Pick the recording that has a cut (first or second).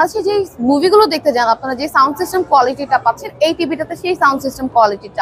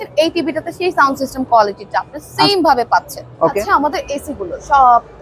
second